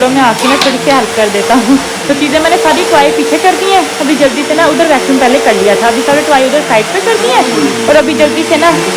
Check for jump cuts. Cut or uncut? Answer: uncut